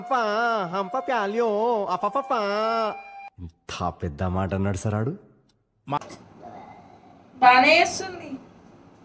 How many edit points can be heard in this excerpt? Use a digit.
1